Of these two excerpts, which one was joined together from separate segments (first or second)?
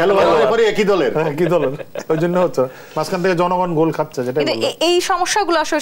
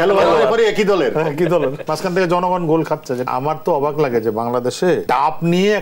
second